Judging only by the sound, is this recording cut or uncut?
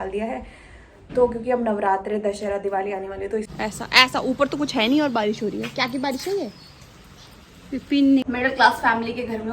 cut